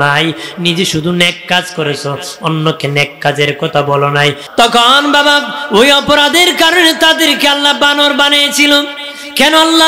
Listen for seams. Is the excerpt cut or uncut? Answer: cut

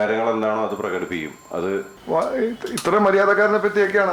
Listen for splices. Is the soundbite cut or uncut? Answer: cut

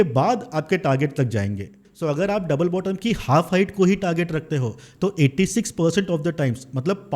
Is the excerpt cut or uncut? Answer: cut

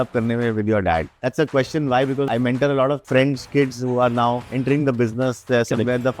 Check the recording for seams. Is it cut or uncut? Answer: cut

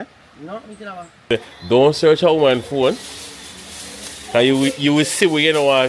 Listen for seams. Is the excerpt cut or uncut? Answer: cut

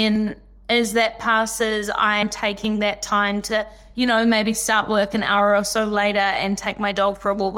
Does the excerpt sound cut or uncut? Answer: cut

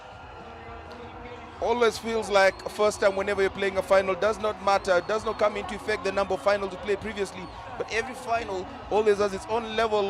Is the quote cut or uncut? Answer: uncut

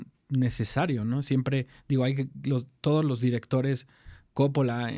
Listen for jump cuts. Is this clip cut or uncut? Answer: uncut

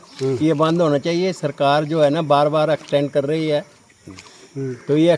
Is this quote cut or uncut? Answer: uncut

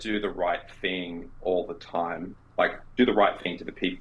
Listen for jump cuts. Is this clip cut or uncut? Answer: uncut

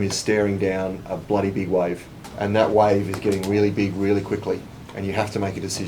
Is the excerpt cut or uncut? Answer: uncut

